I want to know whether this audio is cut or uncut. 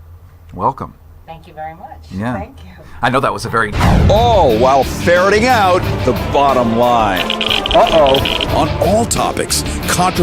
uncut